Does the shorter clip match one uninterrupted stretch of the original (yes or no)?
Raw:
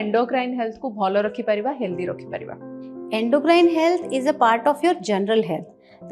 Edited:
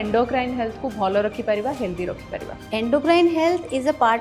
no